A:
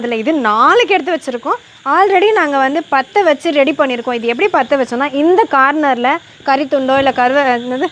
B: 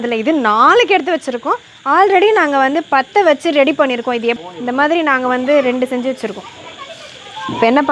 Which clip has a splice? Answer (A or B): B